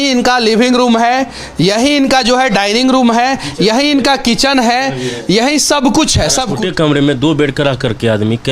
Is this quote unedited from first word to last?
no; 1 cut; at 6.5 s

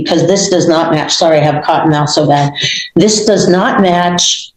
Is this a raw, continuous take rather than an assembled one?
yes; 0 cuts

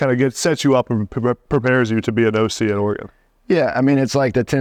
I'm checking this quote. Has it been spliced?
no; 0 cuts

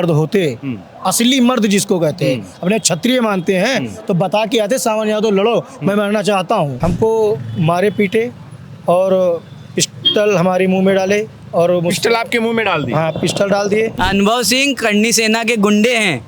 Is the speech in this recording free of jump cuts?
no; 2 cuts; at 6.7 s, 14.0 s

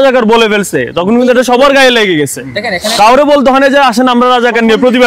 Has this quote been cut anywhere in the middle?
no; 0 cuts

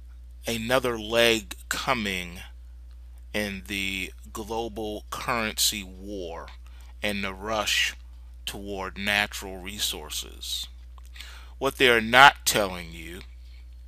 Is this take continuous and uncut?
no; 1 cut; at 2.0 s

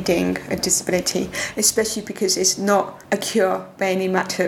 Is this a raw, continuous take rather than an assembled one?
no; 1 cut; at 3.0 s

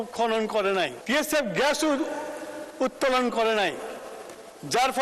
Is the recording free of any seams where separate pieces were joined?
no; 1 cut; at 1.0 s

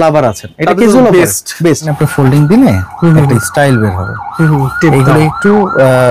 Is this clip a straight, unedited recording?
no; 1 cut; at 1.9 s

